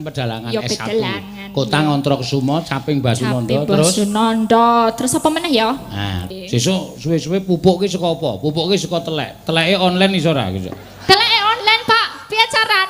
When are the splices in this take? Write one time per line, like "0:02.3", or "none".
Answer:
0:06.3